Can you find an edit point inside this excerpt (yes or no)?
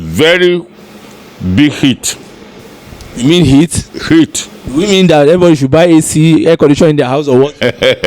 no